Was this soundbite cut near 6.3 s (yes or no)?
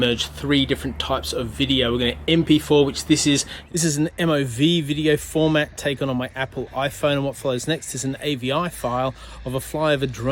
no